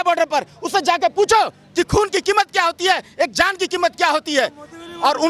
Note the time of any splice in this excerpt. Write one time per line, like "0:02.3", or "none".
none